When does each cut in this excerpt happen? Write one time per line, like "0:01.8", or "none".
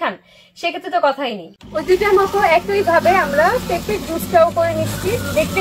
0:01.5